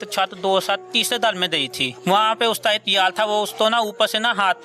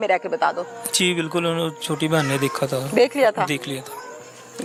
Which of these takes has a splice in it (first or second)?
first